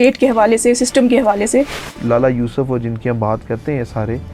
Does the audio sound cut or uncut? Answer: cut